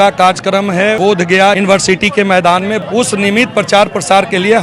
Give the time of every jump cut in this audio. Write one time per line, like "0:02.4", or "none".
0:01.2
0:02.8